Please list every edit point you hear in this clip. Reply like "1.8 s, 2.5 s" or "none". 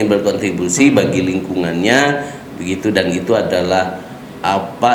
none